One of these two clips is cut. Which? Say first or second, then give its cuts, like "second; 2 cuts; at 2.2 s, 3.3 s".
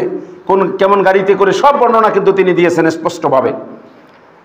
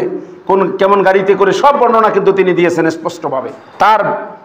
second; 1 cut; at 3.4 s